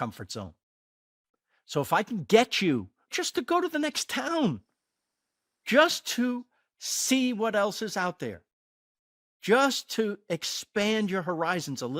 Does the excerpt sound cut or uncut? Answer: cut